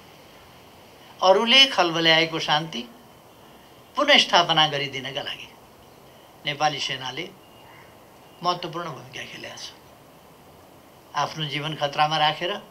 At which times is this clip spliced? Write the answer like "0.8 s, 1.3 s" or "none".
none